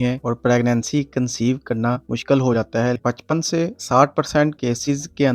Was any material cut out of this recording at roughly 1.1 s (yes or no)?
no